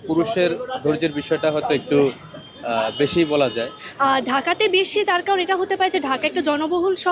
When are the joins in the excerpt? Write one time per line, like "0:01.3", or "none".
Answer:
0:03.8